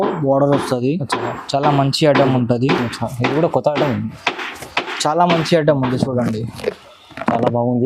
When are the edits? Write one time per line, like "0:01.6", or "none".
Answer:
none